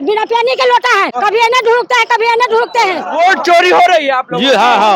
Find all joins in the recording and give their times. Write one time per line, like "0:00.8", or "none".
0:01.1
0:03.0